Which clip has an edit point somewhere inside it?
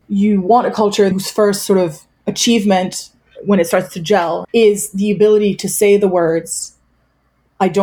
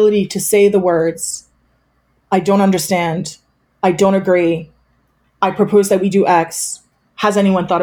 first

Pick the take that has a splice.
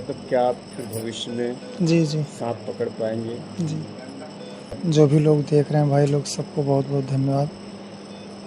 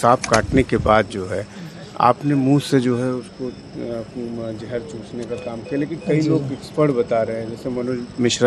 first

